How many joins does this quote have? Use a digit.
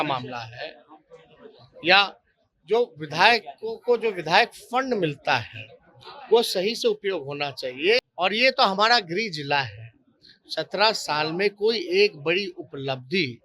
1